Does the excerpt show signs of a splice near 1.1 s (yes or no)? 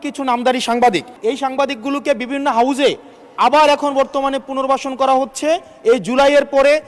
yes